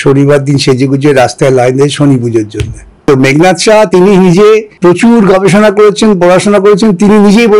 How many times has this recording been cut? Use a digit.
2